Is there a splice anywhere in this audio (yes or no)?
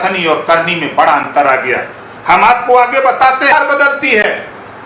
yes